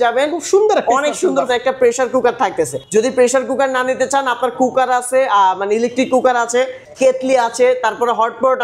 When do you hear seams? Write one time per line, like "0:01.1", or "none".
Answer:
0:01.5
0:02.8
0:06.8